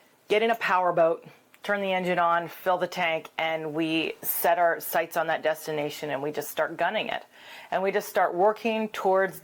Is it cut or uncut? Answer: uncut